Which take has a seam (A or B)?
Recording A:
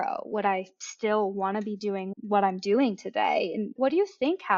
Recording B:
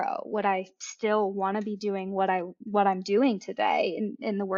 A